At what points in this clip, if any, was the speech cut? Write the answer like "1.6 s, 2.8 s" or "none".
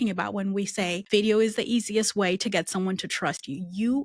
1.0 s